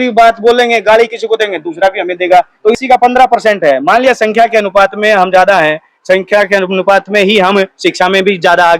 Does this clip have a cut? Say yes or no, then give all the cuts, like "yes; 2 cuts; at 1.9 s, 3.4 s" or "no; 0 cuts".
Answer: yes; 1 cut; at 2.8 s